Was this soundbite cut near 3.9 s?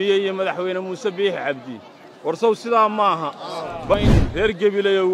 yes; 1 cut; at 3.9 s

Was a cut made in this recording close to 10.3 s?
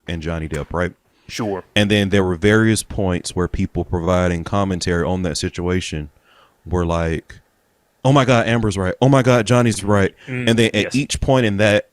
yes; 1 cut; at 10.3 s

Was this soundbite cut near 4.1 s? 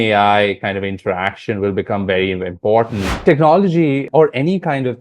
yes; 2 cuts; at 3.2 s, 4.1 s

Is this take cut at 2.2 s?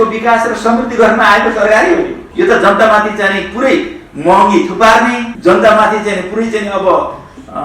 yes; 2 cuts; at 2.2 s, 5.3 s

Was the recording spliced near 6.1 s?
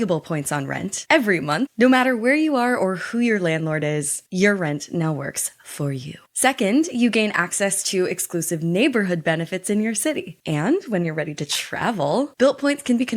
no; 1 cut; at 10.3 s

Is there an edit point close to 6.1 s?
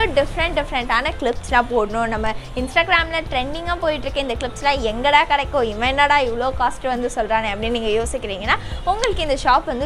no; 0 cuts

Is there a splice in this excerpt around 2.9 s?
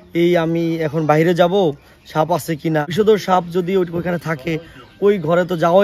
yes; 1 cut; at 2.9 s

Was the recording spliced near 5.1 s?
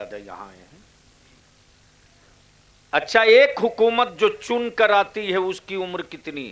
no; 1 cut; at 1.3 s

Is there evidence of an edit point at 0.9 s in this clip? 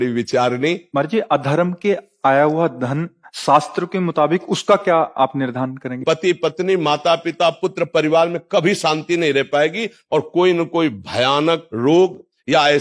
yes; 3 cuts; at 0.9 s, 6.0 s, 11.7 s

